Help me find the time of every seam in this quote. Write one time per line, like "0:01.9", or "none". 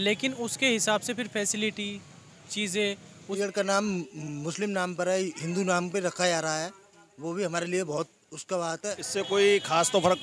0:03.4
0:09.0